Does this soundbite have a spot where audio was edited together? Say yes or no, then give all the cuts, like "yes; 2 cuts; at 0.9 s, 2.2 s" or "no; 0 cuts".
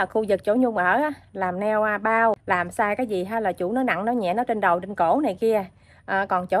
yes; 1 cut; at 2.4 s